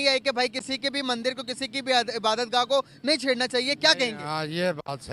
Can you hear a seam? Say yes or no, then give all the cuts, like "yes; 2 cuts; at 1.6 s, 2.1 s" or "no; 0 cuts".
no; 0 cuts